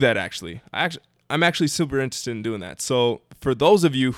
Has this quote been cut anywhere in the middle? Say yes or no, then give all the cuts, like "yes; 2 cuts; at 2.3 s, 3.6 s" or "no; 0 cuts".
no; 0 cuts